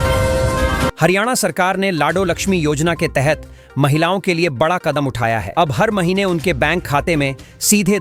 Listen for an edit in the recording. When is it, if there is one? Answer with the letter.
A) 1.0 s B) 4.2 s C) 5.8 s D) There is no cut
A